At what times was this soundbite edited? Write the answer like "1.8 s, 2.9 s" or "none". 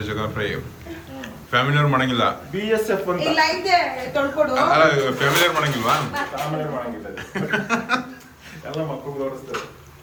none